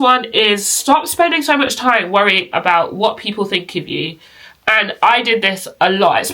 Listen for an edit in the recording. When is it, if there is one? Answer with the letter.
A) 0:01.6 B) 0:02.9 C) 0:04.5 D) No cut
D